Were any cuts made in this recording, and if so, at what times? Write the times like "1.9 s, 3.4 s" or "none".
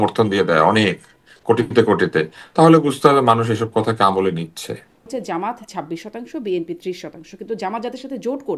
5.1 s